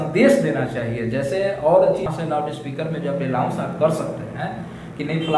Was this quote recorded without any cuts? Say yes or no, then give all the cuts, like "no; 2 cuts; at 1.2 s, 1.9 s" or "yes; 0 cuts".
no; 1 cut; at 2.1 s